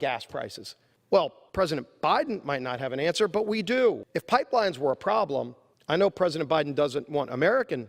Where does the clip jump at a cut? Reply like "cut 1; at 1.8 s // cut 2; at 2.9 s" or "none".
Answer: cut 1; at 4.0 s